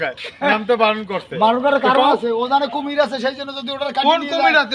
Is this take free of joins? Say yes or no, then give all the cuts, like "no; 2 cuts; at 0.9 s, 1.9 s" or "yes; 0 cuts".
yes; 0 cuts